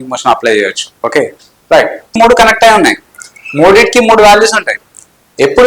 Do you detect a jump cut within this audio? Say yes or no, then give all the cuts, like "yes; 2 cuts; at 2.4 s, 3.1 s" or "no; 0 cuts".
yes; 1 cut; at 2.2 s